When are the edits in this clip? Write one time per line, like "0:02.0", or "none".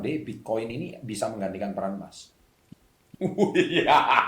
0:02.7